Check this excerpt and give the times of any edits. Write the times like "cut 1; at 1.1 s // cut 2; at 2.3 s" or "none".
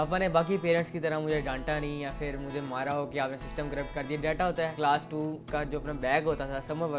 cut 1; at 4.7 s